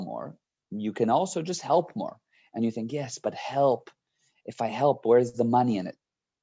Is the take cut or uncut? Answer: uncut